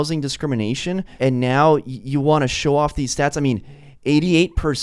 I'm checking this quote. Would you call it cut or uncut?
cut